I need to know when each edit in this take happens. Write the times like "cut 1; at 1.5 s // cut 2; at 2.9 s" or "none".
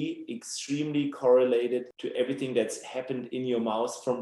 cut 1; at 2.0 s